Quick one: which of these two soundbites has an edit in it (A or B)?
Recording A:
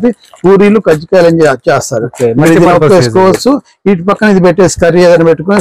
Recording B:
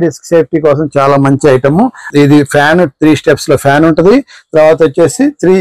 B